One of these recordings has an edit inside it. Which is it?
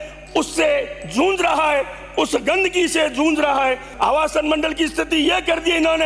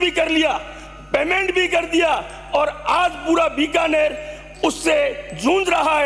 first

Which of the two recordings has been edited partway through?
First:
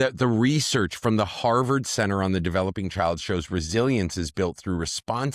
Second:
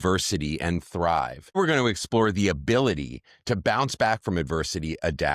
second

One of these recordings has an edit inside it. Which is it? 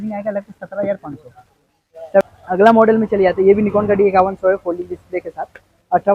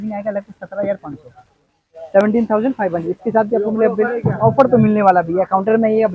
first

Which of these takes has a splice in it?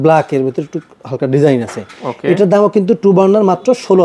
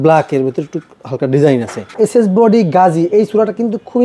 second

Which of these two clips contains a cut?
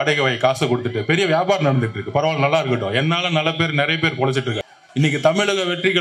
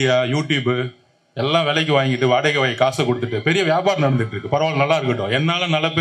first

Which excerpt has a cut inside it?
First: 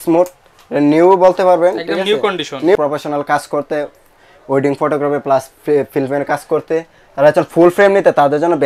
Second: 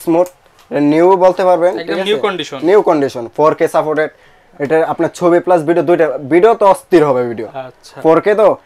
first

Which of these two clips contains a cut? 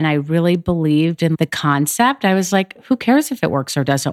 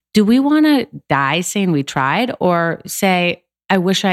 first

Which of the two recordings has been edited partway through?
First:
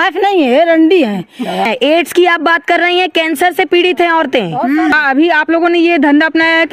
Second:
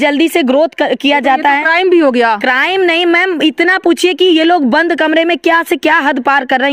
first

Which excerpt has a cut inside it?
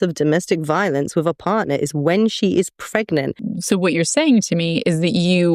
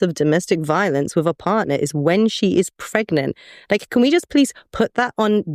first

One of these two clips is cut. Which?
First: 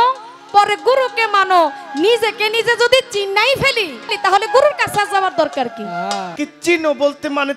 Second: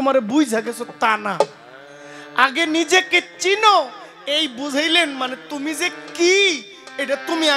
first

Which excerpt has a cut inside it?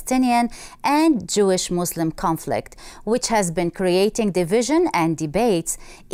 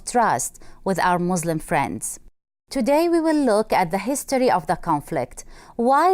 second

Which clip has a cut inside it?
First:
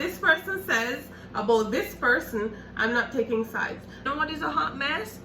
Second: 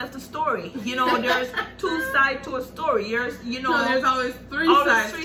first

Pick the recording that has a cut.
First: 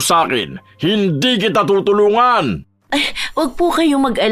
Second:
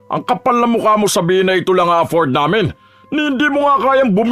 first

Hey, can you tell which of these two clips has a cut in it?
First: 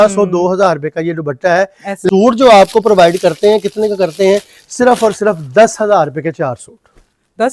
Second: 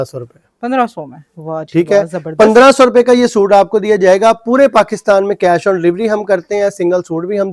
first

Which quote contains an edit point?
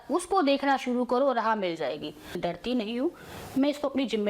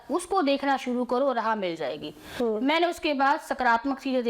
first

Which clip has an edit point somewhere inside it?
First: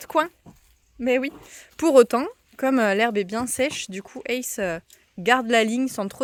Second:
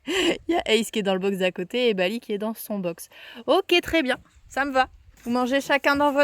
second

